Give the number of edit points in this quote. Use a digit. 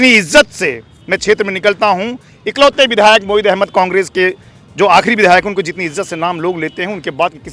0